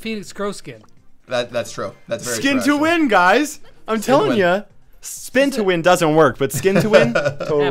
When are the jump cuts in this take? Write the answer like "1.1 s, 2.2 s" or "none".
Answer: none

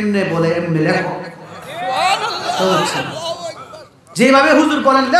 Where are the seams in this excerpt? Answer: none

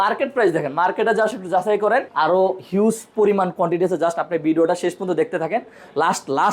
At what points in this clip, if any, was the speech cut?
2.1 s

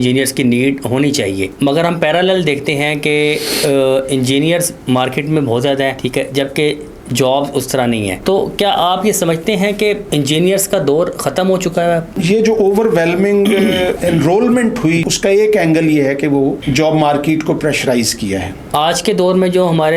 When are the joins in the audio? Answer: 1.5 s, 6.0 s, 8.2 s, 10.0 s, 12.1 s, 14.0 s, 15.0 s, 16.6 s, 18.6 s

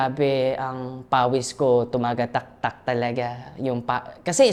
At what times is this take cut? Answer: none

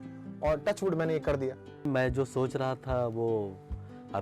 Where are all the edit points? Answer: 1.9 s

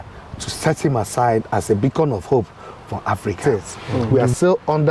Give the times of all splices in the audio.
3.4 s

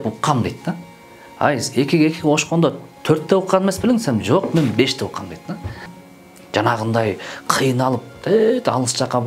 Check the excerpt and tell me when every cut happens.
6.0 s

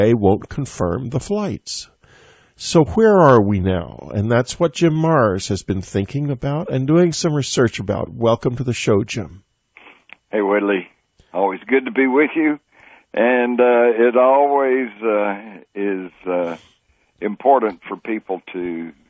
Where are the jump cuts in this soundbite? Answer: 10.8 s

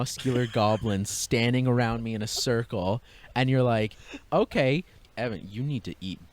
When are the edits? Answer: 4.9 s

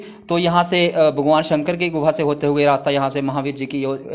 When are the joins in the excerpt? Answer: none

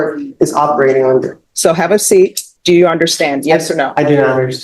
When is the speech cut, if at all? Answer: 1.4 s, 2.5 s

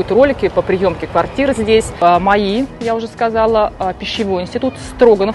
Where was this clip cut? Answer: 2.0 s

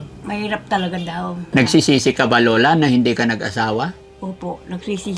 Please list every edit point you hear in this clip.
1.4 s

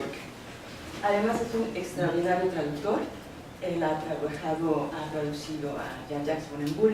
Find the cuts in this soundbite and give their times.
2.0 s

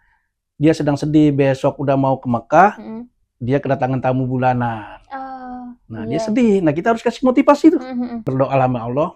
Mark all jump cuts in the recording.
8.2 s

